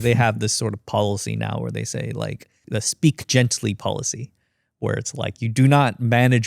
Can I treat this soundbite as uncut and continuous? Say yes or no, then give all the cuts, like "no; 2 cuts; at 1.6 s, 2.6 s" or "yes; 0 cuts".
no; 1 cut; at 5.4 s